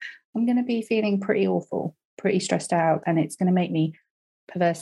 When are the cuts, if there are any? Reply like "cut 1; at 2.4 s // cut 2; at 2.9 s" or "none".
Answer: cut 1; at 3.0 s